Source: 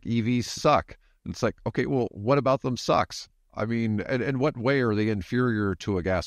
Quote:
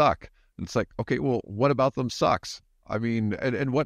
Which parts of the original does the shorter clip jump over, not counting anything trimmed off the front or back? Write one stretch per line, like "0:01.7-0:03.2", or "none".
none